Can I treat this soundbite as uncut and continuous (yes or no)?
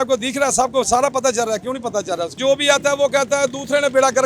no